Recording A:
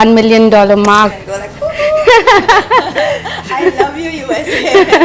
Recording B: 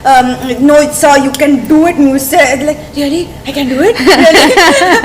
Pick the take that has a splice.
A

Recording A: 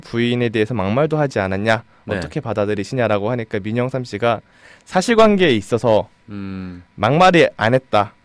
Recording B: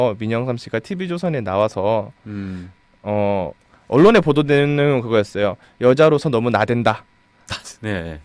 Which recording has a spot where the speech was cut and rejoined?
A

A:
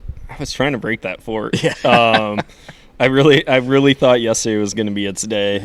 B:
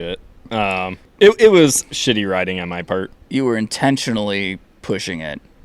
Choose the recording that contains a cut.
B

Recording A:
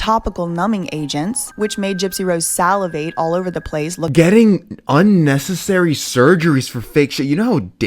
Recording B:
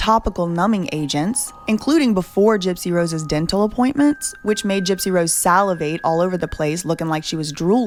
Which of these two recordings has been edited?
A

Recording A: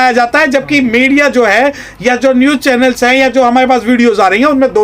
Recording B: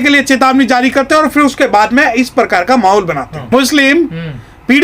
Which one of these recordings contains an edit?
B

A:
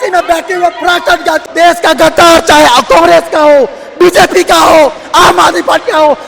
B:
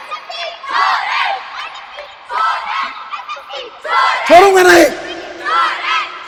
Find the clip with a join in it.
A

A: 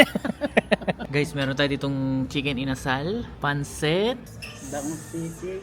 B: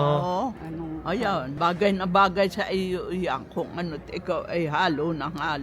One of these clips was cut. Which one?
A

